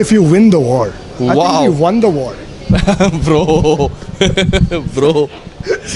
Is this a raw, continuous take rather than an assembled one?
yes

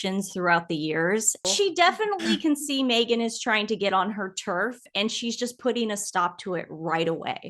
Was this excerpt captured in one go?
no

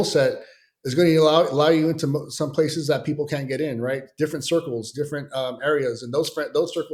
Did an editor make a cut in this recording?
no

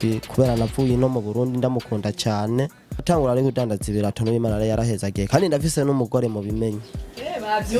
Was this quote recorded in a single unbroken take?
no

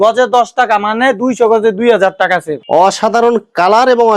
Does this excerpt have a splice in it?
yes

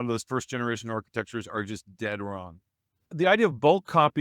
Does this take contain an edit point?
yes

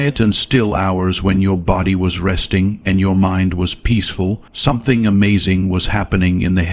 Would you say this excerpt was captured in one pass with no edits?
no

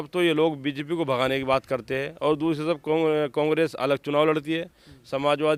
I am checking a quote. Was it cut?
no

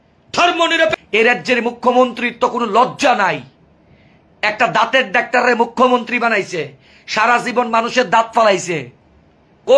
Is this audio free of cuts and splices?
no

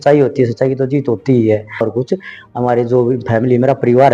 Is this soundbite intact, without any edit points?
no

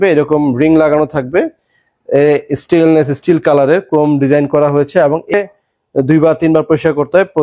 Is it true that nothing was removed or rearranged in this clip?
no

